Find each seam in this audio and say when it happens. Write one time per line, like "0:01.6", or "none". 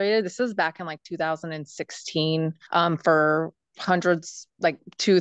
0:02.6